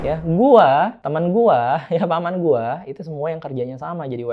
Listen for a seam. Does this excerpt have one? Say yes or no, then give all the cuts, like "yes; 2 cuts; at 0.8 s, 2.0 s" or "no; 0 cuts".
yes; 1 cut; at 1.0 s